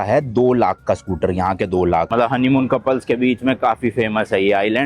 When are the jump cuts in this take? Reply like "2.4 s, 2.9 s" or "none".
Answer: 2.1 s